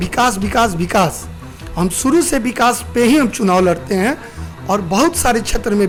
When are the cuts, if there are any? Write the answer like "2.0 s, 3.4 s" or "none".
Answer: none